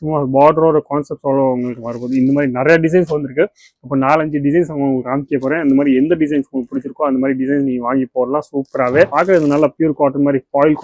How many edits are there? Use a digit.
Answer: 1